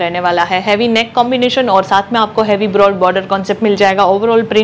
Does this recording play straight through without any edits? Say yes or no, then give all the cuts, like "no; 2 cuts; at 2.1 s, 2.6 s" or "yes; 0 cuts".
yes; 0 cuts